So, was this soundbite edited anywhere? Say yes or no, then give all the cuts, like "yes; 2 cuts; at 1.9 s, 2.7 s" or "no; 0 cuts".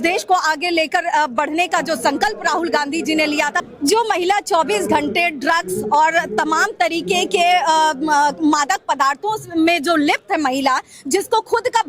yes; 1 cut; at 3.7 s